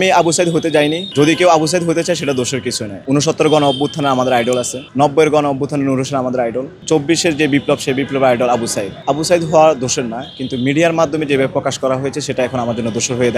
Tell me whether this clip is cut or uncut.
cut